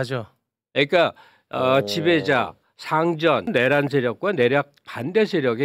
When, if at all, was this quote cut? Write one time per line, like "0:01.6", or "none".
0:03.5